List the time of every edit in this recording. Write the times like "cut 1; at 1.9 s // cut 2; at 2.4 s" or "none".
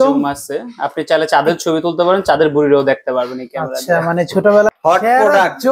cut 1; at 4.8 s